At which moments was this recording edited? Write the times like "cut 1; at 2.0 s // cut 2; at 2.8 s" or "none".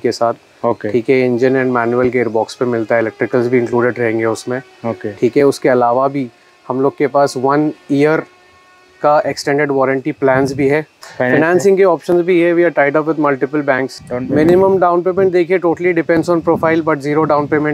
cut 1; at 11.0 s // cut 2; at 14.0 s